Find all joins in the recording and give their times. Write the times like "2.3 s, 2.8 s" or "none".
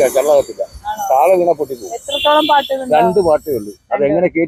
none